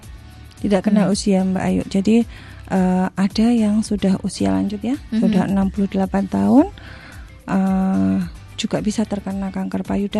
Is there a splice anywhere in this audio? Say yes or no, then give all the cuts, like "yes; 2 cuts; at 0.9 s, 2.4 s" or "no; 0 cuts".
no; 0 cuts